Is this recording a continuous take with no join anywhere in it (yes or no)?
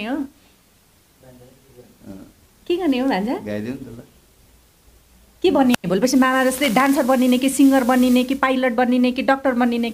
yes